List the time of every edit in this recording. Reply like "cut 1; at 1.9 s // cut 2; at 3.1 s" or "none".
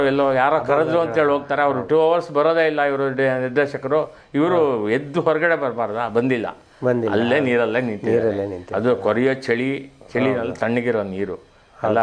cut 1; at 1.9 s